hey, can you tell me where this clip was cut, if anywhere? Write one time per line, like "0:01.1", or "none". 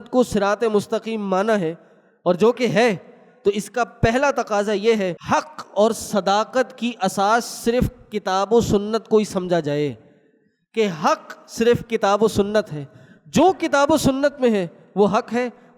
0:05.2